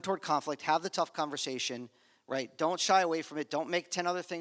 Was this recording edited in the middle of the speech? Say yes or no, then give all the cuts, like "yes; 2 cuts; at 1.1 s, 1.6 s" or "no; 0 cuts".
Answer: no; 0 cuts